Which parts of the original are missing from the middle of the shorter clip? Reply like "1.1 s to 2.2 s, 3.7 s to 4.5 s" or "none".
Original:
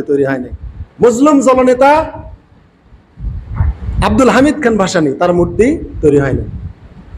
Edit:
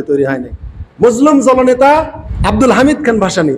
2.2 s to 3.8 s